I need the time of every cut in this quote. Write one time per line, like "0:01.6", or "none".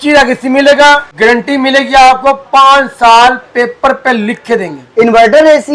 0:01.1